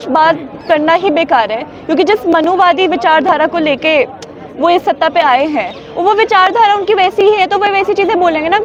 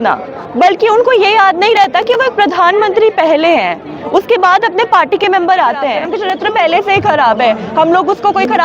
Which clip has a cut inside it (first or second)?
second